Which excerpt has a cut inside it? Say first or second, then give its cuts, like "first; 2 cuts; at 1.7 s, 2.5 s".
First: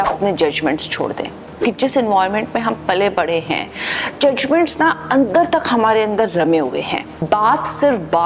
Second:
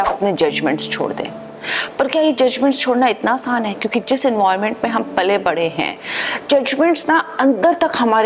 first; 2 cuts; at 1.5 s, 7.1 s